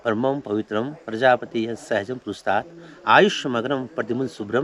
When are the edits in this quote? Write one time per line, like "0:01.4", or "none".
none